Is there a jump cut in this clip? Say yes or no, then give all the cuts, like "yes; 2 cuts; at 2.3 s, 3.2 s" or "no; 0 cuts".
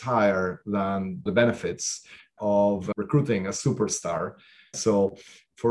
yes; 3 cuts; at 1.2 s, 2.9 s, 4.8 s